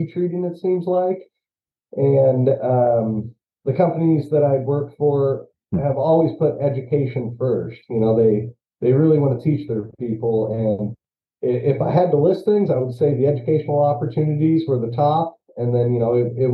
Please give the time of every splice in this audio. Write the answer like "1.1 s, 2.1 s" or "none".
none

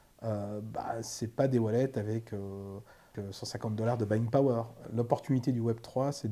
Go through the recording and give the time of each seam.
3.1 s, 4.9 s

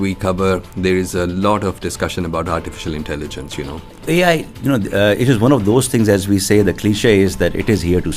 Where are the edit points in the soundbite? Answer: 4.0 s

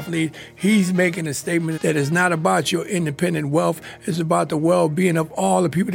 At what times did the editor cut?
1.7 s

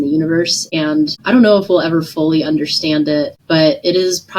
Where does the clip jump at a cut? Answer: 0.9 s, 3.4 s

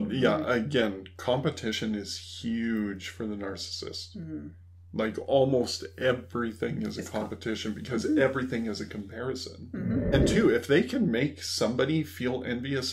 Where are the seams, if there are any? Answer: 10.1 s

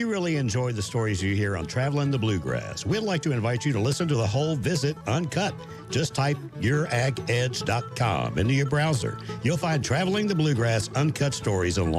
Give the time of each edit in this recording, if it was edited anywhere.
6.1 s

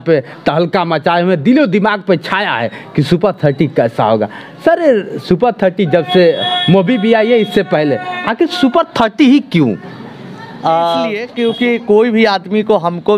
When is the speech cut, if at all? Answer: 11.3 s

